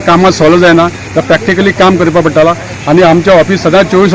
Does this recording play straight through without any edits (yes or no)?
yes